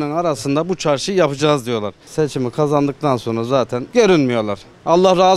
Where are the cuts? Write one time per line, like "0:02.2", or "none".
0:02.0
0:03.8

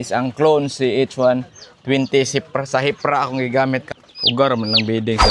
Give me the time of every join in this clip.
0:03.9

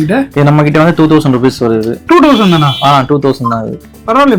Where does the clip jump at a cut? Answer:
none

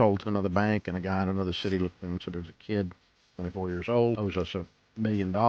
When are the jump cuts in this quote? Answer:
0:04.2

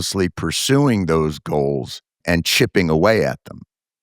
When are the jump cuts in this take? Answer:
0:02.2

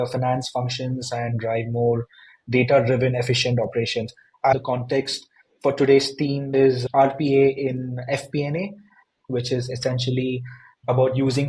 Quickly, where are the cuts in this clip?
0:04.5
0:06.5
0:09.3

